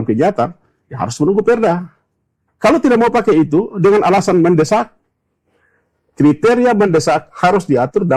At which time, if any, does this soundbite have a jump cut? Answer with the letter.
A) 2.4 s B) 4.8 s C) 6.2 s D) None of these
A